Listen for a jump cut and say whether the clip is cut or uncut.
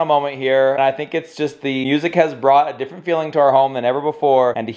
uncut